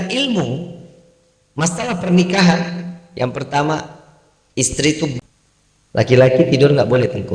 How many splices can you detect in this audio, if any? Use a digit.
1